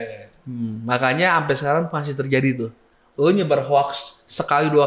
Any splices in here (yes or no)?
no